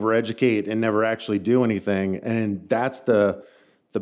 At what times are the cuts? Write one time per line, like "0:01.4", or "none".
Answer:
none